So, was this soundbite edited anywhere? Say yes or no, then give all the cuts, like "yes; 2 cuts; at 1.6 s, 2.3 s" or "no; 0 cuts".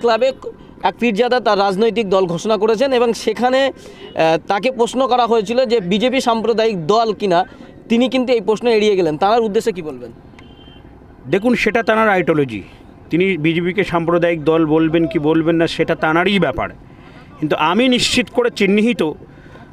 no; 0 cuts